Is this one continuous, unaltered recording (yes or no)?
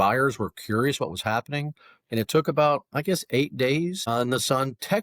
no